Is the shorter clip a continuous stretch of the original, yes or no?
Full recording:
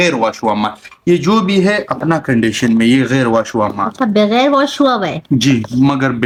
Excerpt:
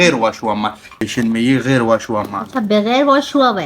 no